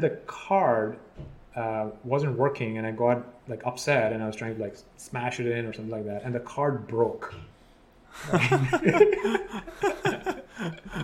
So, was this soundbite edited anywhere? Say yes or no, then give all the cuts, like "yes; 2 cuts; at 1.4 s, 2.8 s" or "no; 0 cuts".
no; 0 cuts